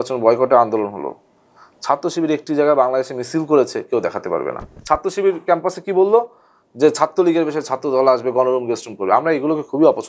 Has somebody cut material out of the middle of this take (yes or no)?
yes